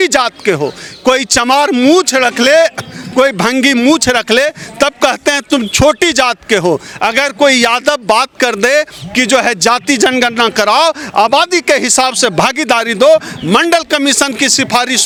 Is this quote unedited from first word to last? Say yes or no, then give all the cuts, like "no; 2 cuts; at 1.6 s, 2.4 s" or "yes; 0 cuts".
yes; 0 cuts